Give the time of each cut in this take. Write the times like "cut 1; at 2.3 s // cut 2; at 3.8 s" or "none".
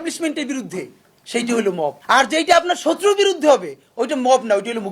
cut 1; at 2.0 s